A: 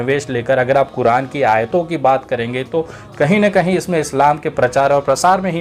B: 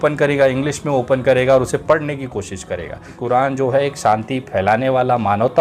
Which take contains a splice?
B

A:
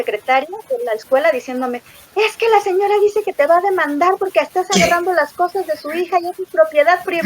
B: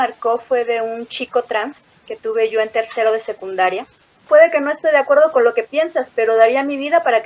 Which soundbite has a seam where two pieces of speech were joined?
B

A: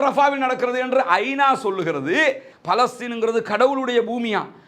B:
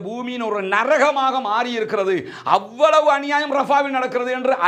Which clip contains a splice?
A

